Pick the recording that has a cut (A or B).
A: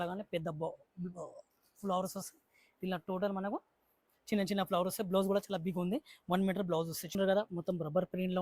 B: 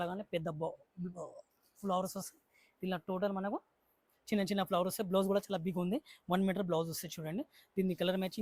A